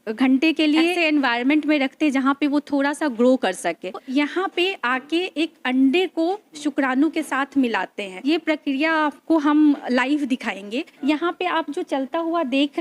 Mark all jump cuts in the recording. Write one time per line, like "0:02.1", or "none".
0:01.0
0:04.0
0:08.1
0:11.0